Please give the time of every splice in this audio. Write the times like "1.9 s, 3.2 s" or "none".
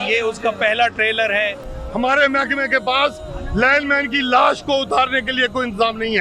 1.7 s